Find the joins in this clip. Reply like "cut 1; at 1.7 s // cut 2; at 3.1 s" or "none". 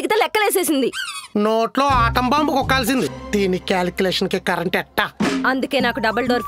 cut 1; at 3.2 s